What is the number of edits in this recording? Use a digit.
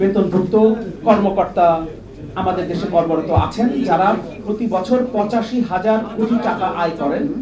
1